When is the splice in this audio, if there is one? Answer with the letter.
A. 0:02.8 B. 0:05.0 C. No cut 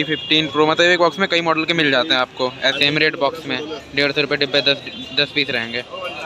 A